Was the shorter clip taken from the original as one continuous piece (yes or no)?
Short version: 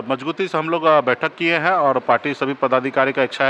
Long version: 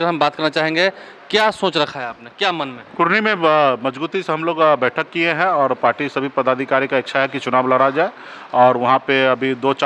yes